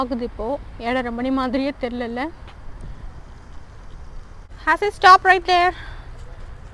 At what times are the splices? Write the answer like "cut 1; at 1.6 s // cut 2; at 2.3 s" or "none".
cut 1; at 4.4 s